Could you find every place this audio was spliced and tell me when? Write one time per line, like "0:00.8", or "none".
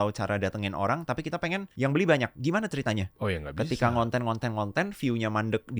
0:01.7
0:03.1